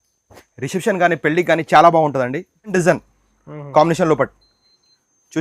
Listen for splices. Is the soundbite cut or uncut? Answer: cut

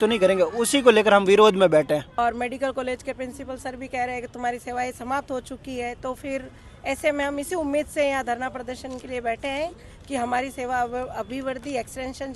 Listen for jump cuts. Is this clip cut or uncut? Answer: cut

